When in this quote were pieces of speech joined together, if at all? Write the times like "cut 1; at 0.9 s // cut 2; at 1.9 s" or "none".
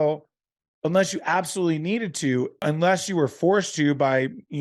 cut 1; at 2.6 s